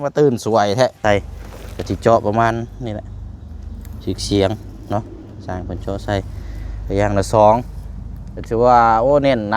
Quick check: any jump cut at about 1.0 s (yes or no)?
yes